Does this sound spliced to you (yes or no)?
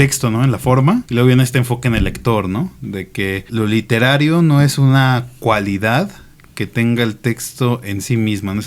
yes